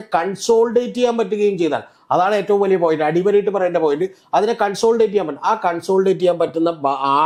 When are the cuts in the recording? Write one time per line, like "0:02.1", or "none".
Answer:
none